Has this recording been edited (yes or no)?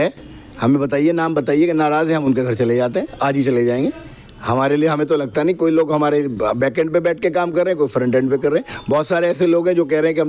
no